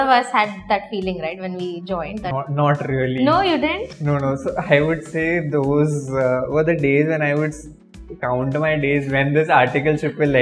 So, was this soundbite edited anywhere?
no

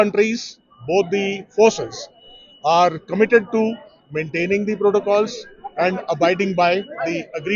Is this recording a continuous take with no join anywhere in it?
yes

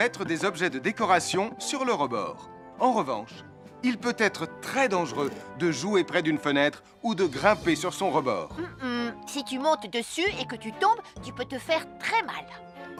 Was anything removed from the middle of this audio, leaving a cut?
no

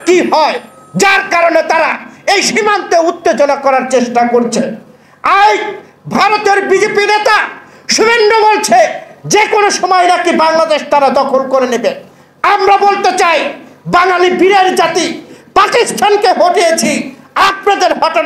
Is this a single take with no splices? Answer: yes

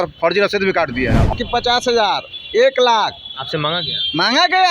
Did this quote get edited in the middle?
yes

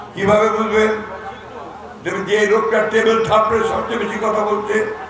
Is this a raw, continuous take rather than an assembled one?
yes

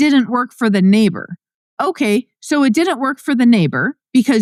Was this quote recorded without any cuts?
yes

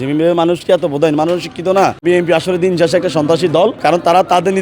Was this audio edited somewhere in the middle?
yes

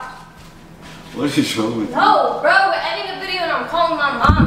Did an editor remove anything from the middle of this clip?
no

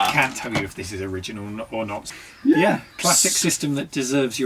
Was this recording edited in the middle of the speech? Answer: yes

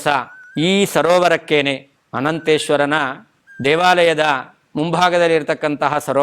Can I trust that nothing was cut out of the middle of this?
yes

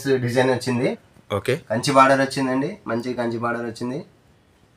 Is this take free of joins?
no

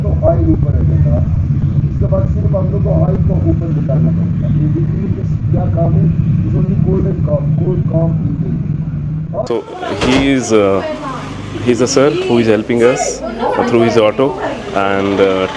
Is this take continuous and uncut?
no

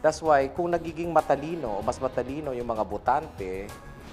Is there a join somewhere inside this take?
yes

